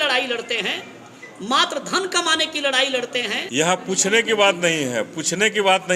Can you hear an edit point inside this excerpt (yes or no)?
yes